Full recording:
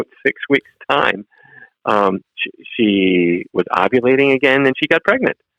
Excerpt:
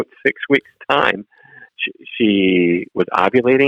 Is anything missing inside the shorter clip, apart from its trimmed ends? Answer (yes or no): yes